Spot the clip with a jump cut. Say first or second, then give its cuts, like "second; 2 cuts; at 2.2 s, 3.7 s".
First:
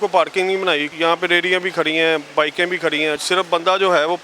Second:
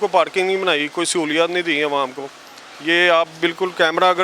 first; 2 cuts; at 0.9 s, 3.2 s